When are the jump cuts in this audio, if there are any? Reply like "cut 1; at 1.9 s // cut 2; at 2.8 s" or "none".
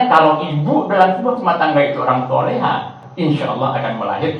cut 1; at 3.0 s